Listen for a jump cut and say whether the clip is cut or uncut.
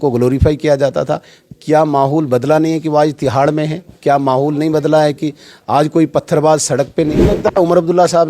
cut